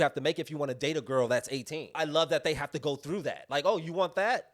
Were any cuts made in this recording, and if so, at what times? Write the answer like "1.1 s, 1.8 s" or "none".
1.9 s, 3.4 s

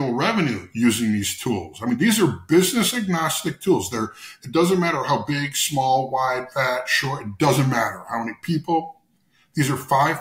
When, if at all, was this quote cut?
none

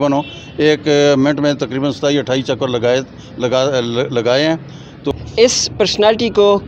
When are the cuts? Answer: 5.1 s

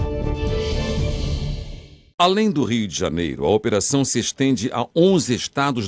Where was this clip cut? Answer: 2.0 s

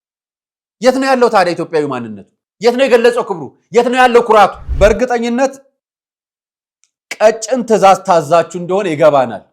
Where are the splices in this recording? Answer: 4.6 s

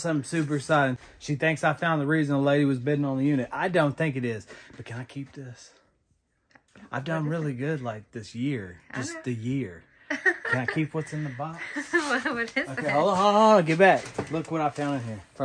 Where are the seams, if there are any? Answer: 1.0 s

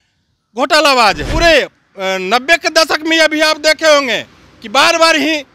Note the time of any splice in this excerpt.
1.3 s

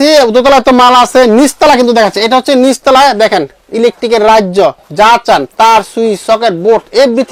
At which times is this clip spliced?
none

